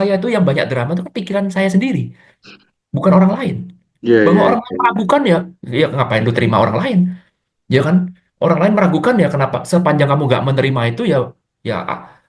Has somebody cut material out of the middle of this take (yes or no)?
no